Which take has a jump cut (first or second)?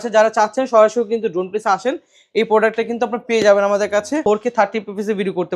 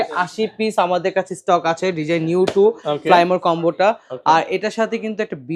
first